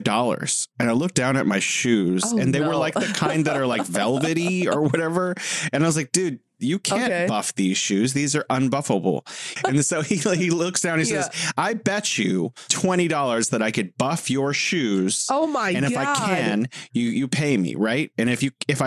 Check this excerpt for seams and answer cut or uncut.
cut